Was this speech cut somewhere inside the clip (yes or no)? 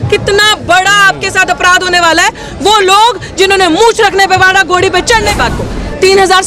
yes